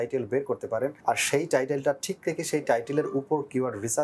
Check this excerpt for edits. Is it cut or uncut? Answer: cut